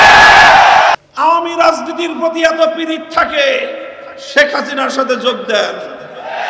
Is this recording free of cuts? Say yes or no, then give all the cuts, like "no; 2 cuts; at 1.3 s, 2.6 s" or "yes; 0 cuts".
no; 1 cut; at 0.9 s